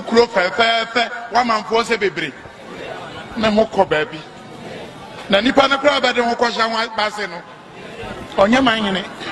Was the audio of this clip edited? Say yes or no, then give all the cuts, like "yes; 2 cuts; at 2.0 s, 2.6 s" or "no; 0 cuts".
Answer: no; 0 cuts